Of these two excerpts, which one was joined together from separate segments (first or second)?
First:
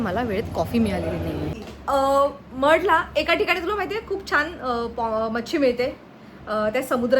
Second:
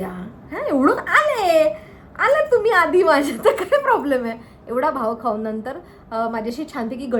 first